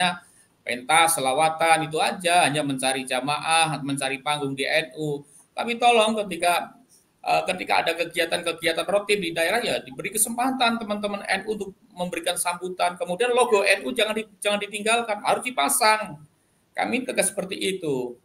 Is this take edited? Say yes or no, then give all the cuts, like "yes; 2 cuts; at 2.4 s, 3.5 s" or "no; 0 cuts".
no; 0 cuts